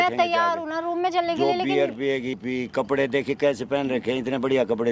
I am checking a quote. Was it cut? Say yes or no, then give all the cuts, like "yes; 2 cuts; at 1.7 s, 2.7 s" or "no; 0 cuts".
yes; 1 cut; at 2.4 s